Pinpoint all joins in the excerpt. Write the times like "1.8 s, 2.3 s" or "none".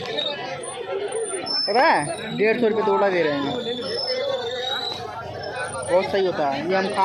none

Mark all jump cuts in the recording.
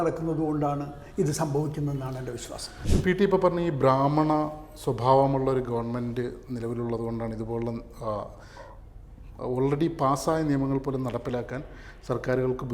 none

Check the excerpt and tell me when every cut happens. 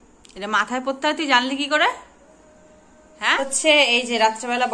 3.4 s

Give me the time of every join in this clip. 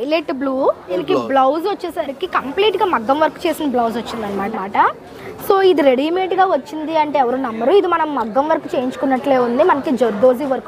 1.0 s, 4.5 s

